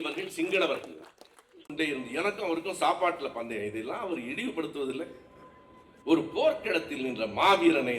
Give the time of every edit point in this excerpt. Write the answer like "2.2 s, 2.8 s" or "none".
1.7 s